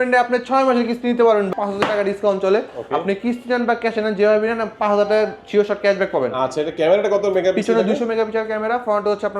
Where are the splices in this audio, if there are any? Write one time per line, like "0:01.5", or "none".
0:01.5

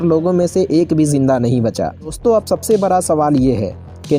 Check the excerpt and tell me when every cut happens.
0:02.2

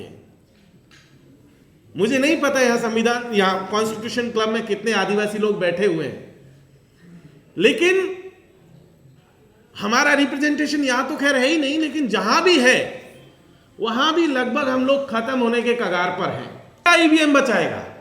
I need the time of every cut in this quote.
0:16.9

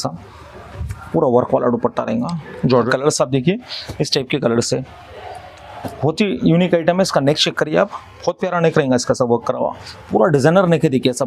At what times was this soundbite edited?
0:02.9

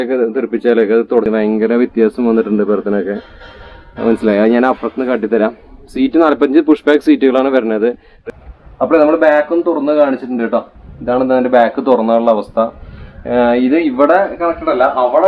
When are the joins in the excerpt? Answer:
0:01.3
0:08.1

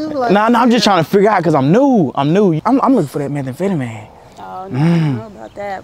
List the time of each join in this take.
0:02.6

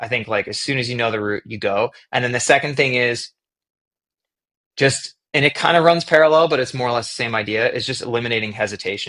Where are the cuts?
none

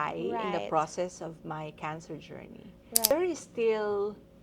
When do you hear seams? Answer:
0:03.1

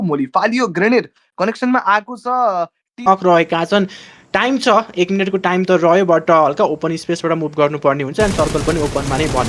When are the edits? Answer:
0:03.1

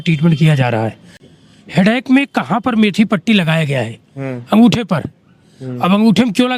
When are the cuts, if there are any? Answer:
0:01.2

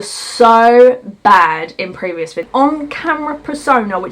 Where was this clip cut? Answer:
0:02.5

